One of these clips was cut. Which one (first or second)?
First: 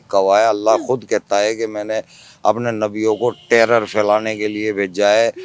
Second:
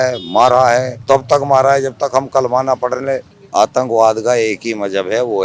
second